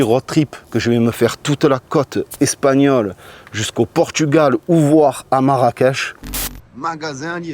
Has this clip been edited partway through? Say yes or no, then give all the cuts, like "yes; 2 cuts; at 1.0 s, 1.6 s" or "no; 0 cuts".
yes; 1 cut; at 6.1 s